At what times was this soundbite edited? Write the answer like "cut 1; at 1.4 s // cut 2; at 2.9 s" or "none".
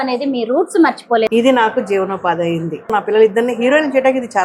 cut 1; at 1.3 s // cut 2; at 2.9 s

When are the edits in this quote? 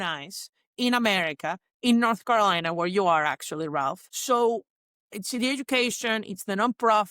cut 1; at 4.0 s

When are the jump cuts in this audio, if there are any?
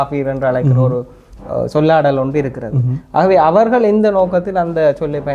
none

